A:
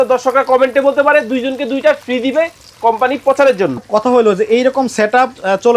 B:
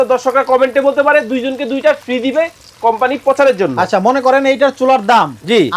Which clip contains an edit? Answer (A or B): A